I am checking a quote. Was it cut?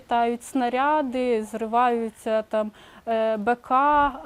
no; 0 cuts

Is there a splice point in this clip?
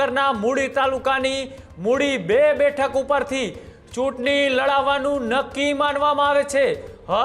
no; 0 cuts

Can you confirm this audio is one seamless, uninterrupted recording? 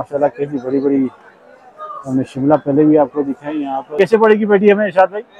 no; 1 cut; at 3.9 s

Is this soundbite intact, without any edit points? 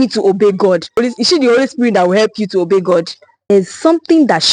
no; 2 cuts; at 1.0 s, 3.5 s

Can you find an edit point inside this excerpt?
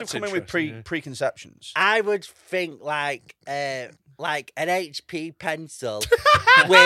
no; 0 cuts

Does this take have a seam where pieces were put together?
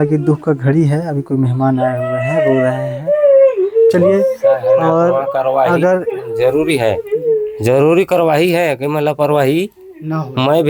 no; 0 cuts

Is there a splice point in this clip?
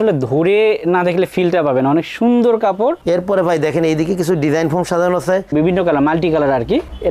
yes; 2 cuts; at 3.0 s, 5.5 s

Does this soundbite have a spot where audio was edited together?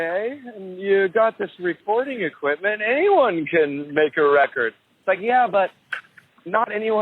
no; 0 cuts

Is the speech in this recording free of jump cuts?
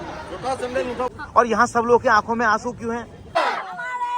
no; 2 cuts; at 1.1 s, 3.3 s

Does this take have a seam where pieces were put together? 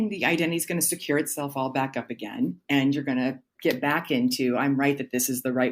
yes; 1 cut; at 3.5 s

